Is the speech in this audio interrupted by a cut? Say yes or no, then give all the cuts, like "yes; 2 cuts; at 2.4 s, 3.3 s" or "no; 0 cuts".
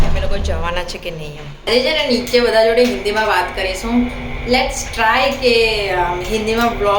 yes; 1 cut; at 1.7 s